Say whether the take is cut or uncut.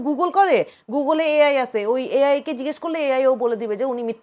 uncut